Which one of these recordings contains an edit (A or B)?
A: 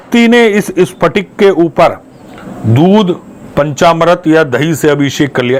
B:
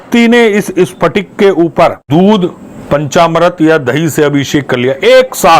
B